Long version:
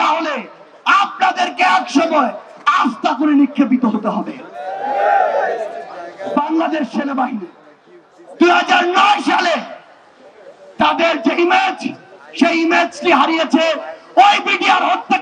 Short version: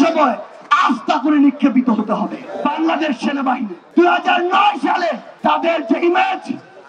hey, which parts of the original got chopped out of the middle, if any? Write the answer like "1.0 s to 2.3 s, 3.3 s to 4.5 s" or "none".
4.4 s to 6.1 s, 7.5 s to 8.2 s, 9.7 s to 10.6 s